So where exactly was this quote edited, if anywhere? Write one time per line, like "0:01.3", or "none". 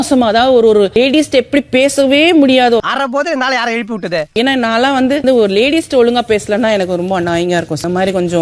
none